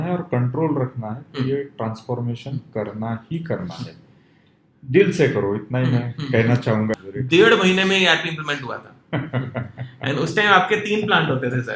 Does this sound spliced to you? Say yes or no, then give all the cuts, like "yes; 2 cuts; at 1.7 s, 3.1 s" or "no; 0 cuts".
yes; 1 cut; at 7.1 s